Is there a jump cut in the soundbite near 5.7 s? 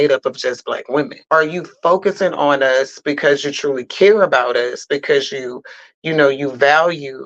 no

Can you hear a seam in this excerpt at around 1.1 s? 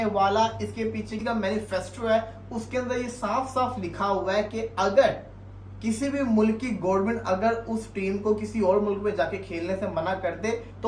yes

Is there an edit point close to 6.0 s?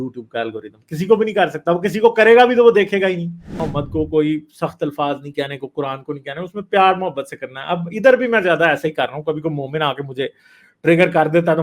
no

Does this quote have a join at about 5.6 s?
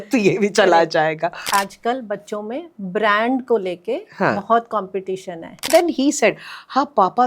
yes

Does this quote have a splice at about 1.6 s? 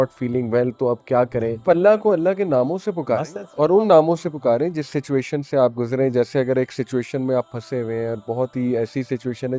yes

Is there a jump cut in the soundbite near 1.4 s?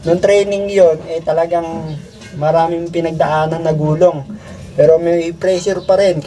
no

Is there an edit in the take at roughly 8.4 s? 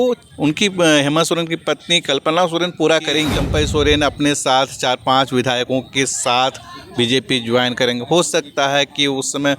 no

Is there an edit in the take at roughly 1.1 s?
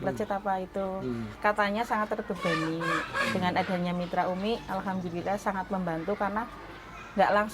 yes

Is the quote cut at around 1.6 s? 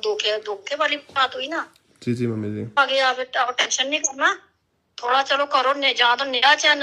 no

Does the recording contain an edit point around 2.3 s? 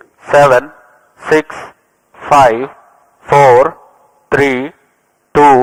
no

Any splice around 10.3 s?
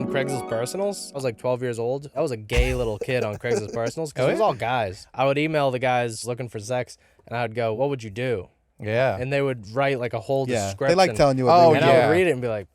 no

